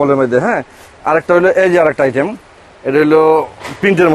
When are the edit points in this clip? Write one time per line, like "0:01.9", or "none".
none